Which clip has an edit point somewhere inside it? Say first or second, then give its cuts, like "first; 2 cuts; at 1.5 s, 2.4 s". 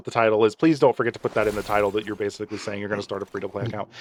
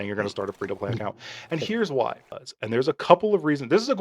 second; 1 cut; at 2.3 s